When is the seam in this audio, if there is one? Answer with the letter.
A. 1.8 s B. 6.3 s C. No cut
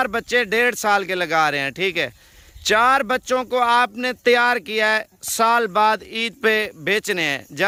C